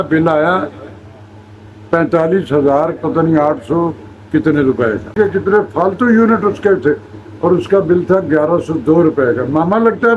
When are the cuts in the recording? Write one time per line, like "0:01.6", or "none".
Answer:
0:05.1